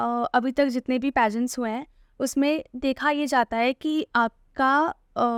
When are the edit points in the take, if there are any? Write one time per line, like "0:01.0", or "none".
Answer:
none